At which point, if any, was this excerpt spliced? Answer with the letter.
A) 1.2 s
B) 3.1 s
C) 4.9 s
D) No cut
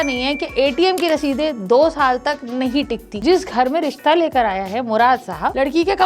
B